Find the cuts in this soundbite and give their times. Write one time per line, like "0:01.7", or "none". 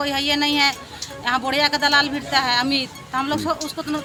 none